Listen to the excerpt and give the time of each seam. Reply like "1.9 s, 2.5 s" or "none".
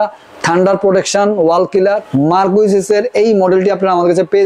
2.1 s